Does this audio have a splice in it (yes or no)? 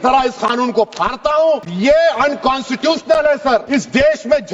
yes